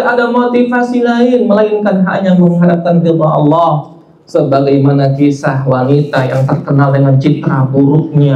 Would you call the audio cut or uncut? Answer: uncut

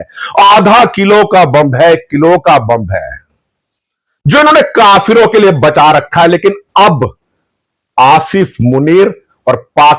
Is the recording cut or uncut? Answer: uncut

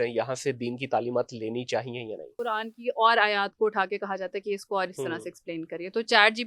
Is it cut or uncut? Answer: cut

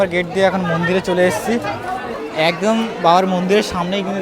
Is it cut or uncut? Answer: cut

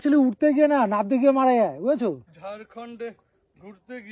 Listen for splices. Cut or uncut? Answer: cut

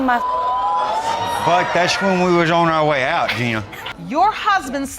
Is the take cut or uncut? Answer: cut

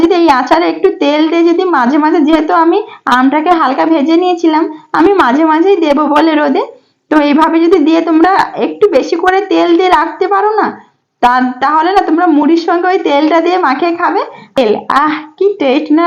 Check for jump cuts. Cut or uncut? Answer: cut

